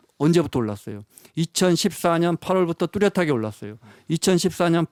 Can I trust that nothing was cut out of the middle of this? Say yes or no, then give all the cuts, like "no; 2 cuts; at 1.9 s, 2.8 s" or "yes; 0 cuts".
yes; 0 cuts